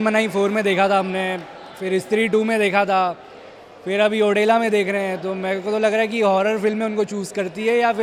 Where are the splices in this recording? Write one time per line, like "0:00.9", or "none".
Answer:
none